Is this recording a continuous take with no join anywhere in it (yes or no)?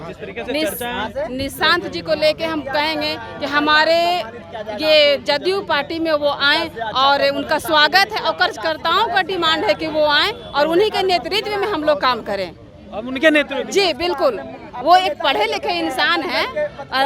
yes